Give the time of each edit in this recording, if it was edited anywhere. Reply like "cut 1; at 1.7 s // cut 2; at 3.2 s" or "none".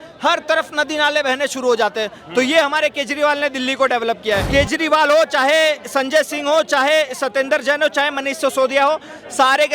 cut 1; at 4.5 s